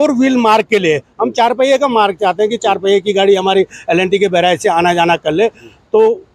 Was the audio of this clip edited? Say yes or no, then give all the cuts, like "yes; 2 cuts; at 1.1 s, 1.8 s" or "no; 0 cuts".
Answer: no; 0 cuts